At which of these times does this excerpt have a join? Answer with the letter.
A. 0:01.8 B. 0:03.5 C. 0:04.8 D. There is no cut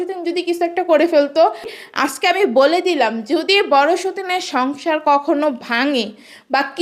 A